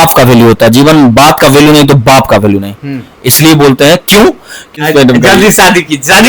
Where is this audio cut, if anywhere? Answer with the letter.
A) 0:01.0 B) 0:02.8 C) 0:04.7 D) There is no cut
C